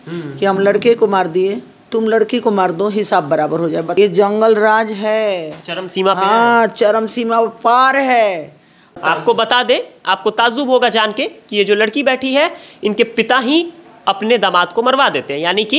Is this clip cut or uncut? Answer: cut